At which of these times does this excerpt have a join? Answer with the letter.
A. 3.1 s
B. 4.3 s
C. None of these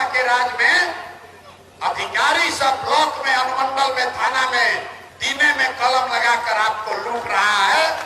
C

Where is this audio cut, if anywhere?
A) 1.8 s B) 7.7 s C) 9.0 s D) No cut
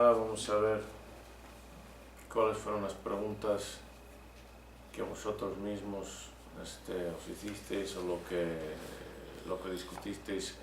C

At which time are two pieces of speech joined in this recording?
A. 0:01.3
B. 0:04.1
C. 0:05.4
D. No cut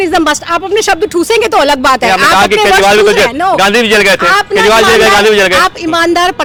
D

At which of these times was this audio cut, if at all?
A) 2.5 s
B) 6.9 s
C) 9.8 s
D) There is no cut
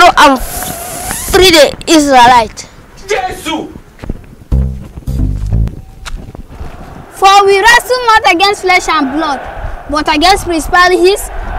D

